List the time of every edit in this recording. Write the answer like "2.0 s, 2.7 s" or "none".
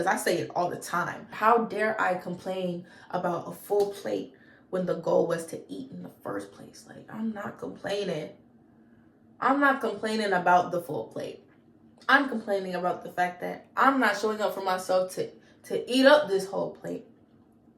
1.3 s